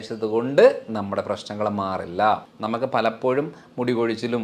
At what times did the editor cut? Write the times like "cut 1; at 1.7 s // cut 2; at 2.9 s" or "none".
cut 1; at 2.5 s